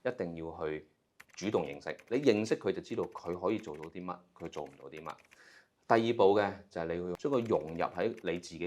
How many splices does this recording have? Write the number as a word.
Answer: two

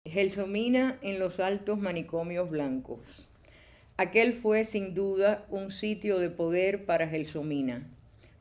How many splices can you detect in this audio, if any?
one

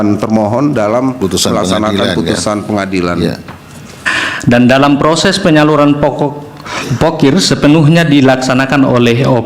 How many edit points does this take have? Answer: one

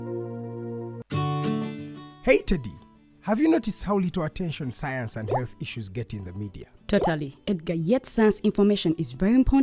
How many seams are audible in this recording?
one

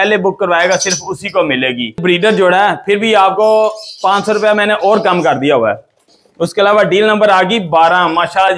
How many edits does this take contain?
two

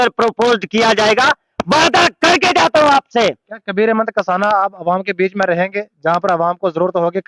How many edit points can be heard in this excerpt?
zero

